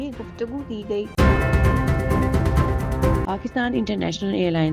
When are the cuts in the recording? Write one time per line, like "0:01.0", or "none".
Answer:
0:01.1
0:03.3